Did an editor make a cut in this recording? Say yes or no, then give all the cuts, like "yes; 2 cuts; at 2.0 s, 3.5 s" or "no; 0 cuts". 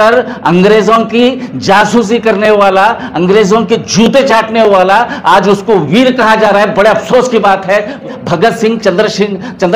yes; 1 cut; at 8.1 s